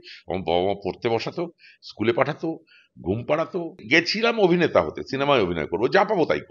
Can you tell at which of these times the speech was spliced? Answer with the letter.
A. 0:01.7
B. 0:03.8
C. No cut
B